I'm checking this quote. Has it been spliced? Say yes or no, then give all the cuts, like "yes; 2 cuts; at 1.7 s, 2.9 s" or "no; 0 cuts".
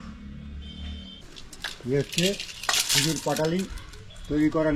yes; 1 cut; at 1.4 s